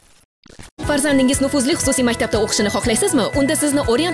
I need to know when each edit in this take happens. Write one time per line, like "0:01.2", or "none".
none